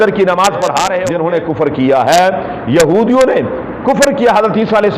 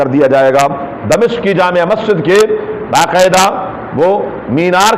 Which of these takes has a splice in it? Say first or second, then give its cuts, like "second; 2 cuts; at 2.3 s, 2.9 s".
first; 1 cut; at 1.0 s